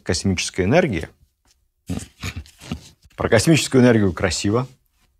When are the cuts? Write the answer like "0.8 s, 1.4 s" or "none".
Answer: 3.0 s